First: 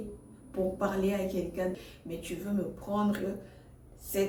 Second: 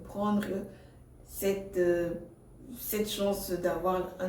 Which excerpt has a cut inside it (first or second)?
first